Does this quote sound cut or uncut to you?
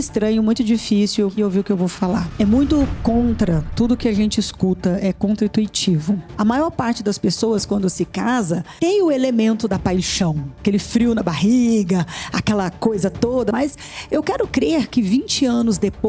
cut